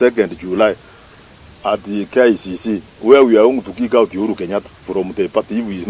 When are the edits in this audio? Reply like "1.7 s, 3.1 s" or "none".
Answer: none